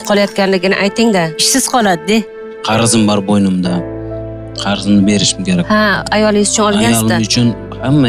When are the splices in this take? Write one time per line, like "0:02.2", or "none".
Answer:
0:02.5

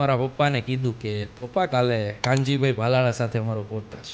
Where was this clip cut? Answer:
0:01.3
0:02.1

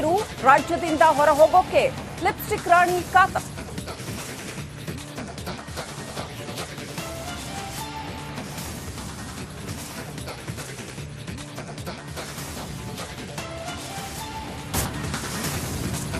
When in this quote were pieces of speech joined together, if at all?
0:14.9

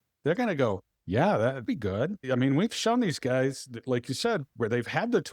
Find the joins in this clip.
0:02.0

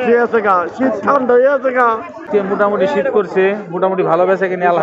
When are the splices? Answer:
0:02.2

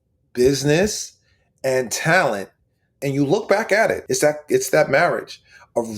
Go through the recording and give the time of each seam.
0:03.0
0:04.0

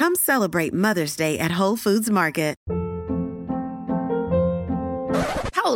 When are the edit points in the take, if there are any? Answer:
0:02.6

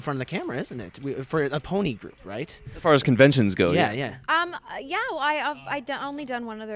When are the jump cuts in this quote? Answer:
0:04.2

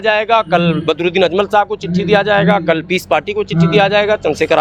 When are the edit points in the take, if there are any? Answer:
none

